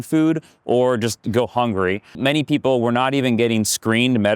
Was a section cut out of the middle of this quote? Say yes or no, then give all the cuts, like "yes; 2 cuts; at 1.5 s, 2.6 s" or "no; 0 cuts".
yes; 1 cut; at 2.2 s